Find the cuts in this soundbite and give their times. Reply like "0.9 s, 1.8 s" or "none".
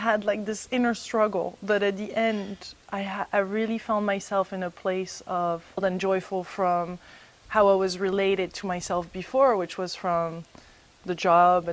none